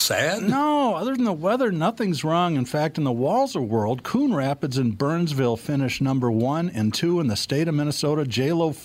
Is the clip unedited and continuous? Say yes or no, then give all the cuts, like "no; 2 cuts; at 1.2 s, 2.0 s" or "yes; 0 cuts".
yes; 0 cuts